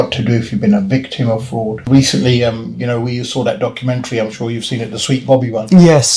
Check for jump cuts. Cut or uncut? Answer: cut